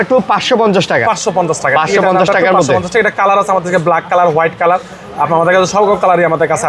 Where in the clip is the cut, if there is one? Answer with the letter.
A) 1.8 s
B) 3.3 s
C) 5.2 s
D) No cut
D